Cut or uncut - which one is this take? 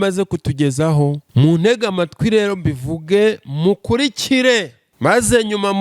cut